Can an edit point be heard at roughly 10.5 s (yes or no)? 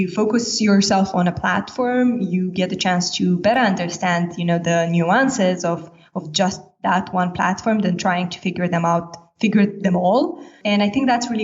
yes